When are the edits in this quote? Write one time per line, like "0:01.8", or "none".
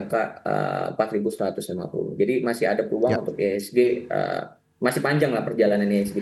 none